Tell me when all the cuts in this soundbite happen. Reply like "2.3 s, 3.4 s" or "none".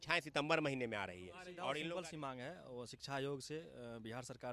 1.8 s